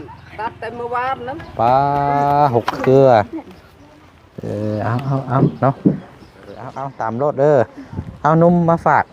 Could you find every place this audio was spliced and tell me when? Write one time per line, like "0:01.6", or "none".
0:06.8